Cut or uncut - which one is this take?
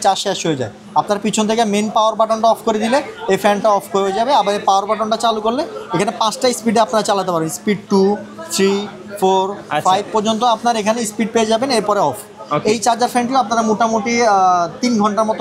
uncut